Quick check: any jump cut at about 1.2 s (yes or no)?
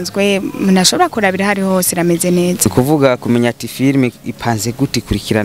no